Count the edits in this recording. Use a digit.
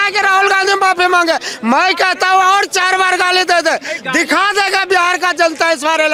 0